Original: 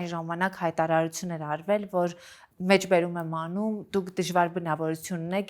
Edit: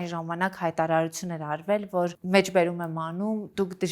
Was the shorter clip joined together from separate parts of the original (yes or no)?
yes